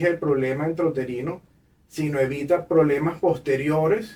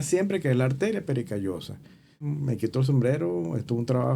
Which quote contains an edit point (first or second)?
second